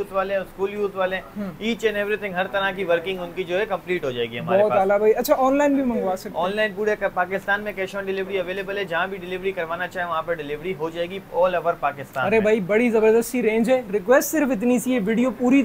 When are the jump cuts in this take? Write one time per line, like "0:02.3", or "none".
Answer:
none